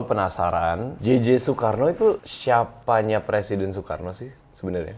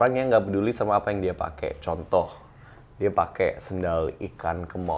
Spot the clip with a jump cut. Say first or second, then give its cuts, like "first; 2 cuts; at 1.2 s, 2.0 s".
first; 2 cuts; at 0.9 s, 2.3 s